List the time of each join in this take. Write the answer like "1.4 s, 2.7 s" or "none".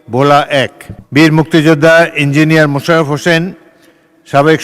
0.9 s